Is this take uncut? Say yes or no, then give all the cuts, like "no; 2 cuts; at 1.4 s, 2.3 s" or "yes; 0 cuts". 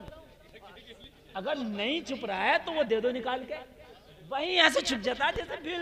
yes; 0 cuts